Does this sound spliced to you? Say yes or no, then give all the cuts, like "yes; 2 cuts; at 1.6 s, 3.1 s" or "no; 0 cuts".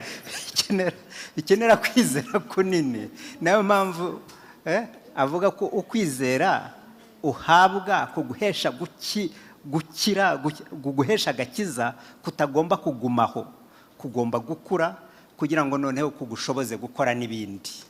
no; 0 cuts